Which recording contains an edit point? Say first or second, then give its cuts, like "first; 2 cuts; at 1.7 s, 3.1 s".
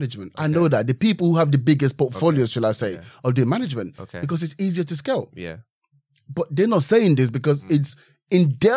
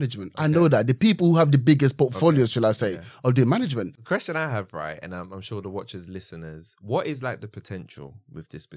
second; 1 cut; at 4.0 s